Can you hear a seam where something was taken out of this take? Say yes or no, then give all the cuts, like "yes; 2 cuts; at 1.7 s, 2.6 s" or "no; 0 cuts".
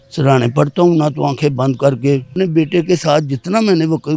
yes; 1 cut; at 2.3 s